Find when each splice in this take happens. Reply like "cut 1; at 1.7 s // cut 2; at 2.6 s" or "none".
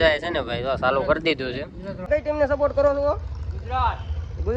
cut 1; at 2.0 s